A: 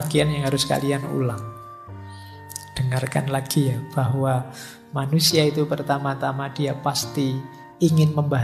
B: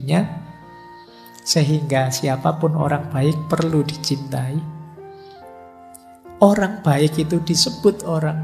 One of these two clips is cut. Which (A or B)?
B